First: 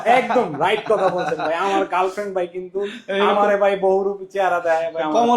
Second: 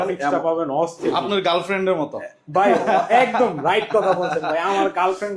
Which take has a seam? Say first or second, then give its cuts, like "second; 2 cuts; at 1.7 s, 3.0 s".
second; 1 cut; at 1.0 s